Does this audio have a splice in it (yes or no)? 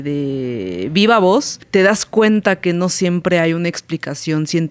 yes